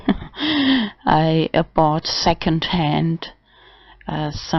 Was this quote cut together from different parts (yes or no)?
yes